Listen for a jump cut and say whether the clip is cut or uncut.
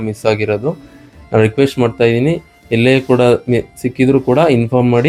uncut